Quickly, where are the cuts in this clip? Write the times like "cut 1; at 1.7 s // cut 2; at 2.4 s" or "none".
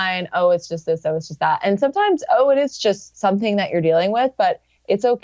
none